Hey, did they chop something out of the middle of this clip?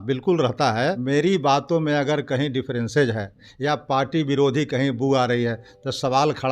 yes; 1 cut; at 1.0 s

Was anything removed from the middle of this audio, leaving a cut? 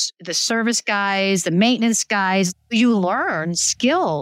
yes; 1 cut; at 2.5 s

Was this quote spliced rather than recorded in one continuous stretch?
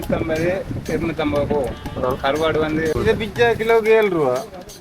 yes; 1 cut; at 2.9 s

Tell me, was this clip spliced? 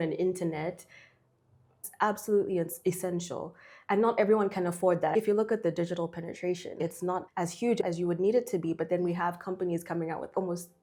no; 0 cuts

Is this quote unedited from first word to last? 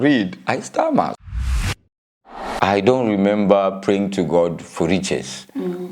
no; 2 cuts; at 1.2 s, 2.5 s

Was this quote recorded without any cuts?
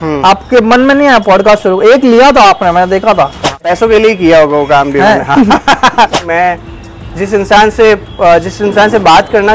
no; 2 cuts; at 3.6 s, 6.1 s

